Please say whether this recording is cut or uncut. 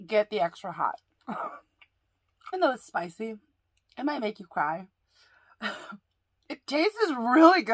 cut